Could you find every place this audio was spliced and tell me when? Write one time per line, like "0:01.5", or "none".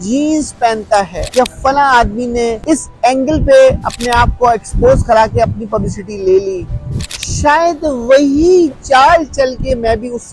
0:01.2
0:02.6